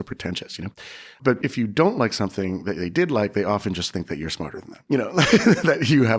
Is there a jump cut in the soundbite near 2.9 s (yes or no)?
no